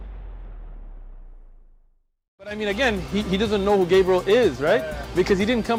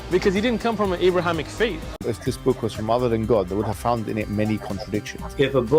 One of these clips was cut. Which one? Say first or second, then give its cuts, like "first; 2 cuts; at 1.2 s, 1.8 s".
second; 1 cut; at 1.9 s